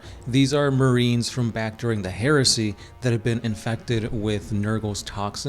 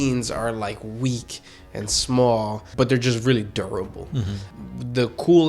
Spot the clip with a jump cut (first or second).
second